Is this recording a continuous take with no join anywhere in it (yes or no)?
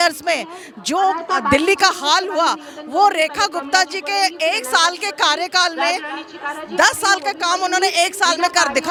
yes